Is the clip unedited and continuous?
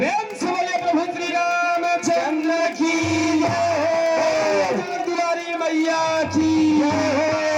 yes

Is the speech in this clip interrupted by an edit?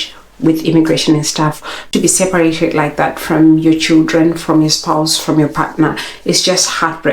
yes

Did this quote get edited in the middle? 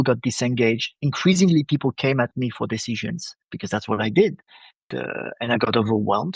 yes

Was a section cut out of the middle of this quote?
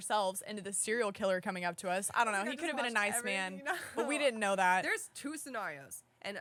no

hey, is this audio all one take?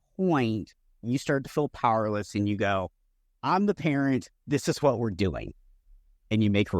yes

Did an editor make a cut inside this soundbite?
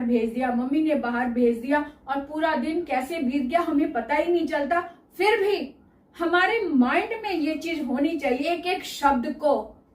yes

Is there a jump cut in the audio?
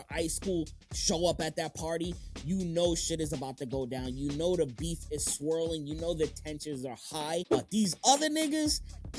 yes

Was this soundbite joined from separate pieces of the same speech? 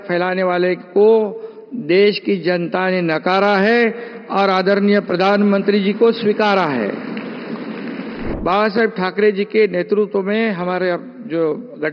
yes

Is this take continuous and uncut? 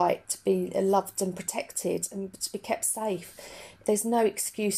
no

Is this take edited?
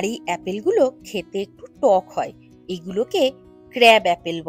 no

